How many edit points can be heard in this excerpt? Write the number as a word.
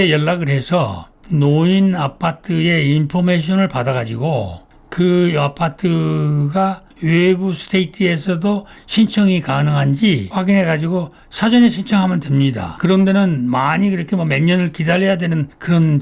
two